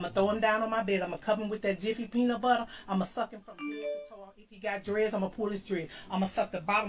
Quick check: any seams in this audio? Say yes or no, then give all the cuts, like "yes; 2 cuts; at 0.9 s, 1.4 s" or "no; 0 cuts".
no; 0 cuts